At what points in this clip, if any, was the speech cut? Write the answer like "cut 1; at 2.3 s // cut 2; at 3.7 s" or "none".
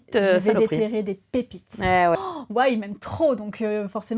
cut 1; at 2.1 s